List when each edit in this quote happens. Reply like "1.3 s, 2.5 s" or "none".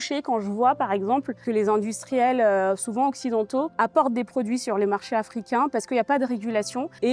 none